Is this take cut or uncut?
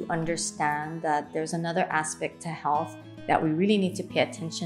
uncut